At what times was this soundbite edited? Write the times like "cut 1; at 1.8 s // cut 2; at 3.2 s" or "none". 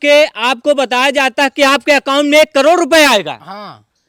none